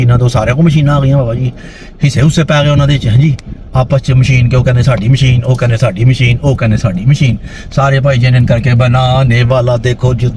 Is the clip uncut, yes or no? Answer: yes